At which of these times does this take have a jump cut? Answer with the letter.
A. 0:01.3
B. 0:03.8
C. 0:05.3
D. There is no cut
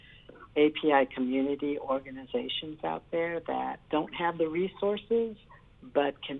B